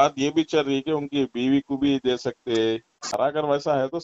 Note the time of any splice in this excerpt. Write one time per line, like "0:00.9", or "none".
0:03.1